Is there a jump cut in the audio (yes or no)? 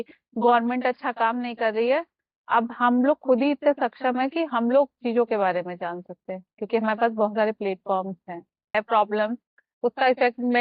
yes